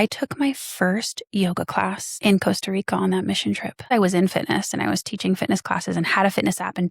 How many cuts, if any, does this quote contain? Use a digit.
2